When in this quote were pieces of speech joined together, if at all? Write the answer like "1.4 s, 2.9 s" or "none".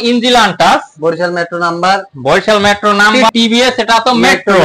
3.2 s